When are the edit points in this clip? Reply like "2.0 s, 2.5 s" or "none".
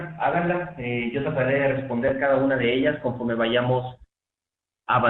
2.6 s